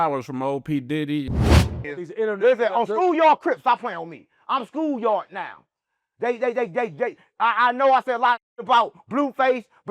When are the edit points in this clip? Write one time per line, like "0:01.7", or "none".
0:01.6